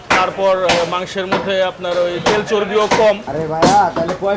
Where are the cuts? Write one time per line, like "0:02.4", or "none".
0:03.3